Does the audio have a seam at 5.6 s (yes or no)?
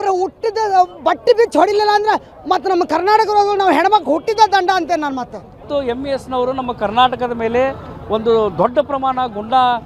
yes